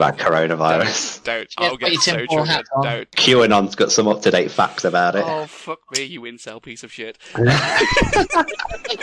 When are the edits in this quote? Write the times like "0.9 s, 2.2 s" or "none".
3.1 s